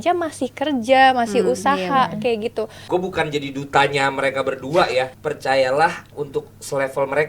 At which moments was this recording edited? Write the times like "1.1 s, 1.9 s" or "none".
2.8 s, 5.2 s, 6.2 s